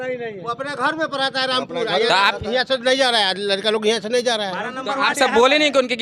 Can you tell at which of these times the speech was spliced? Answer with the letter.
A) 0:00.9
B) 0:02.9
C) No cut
C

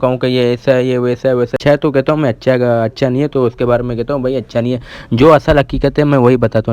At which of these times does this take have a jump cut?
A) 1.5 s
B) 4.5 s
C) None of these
A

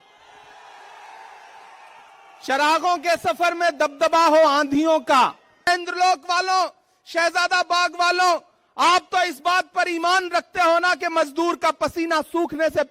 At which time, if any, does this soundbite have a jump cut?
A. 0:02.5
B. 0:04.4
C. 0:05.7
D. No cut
C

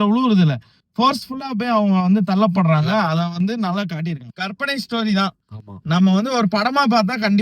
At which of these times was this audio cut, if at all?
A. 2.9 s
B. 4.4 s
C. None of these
B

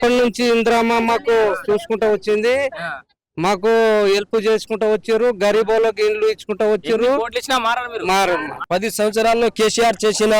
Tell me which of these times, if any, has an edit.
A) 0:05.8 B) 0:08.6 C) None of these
B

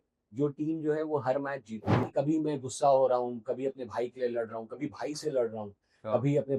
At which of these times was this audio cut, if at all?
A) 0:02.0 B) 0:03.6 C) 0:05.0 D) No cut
A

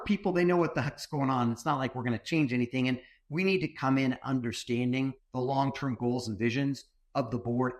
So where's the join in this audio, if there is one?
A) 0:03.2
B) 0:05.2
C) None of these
B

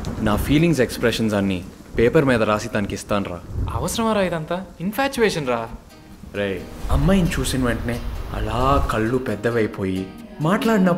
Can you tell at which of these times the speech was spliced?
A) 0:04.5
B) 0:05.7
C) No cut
B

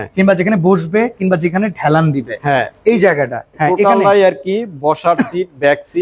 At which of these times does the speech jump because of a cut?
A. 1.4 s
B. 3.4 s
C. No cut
B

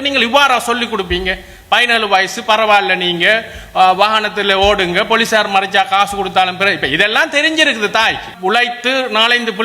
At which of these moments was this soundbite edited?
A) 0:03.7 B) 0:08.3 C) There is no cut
B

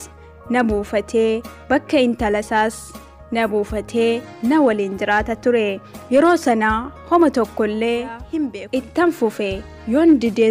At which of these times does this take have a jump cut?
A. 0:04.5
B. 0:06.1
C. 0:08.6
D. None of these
C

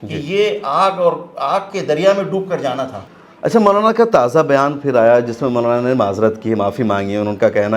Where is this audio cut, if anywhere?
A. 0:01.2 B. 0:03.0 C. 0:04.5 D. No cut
B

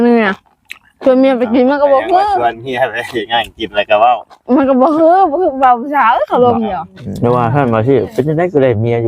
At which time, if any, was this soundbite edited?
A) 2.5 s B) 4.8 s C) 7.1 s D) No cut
C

